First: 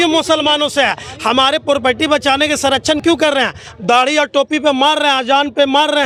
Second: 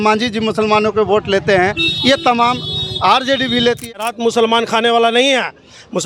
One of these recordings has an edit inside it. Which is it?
second; 1 cut; at 3.8 s

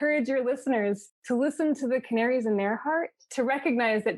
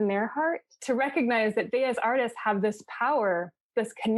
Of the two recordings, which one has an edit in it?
first; 1 cut; at 1.1 s

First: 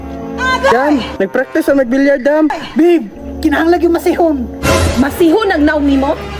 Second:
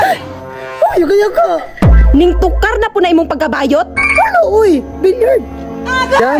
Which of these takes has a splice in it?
first; 1 cut; at 2.6 s

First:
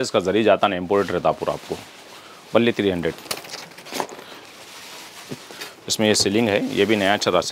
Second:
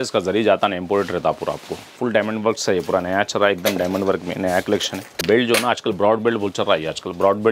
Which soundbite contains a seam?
second; 2 cuts; at 2.0 s, 5.2 s

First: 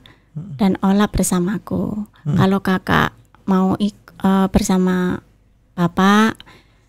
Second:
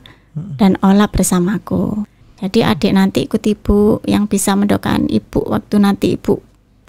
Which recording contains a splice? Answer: second; 1 cut; at 2.2 s

